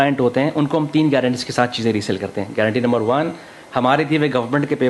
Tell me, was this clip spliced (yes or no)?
no